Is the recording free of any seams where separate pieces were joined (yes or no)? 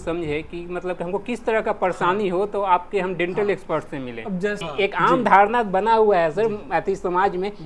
no